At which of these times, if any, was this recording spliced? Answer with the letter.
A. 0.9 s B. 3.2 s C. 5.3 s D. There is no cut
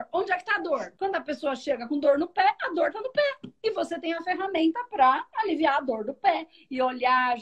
A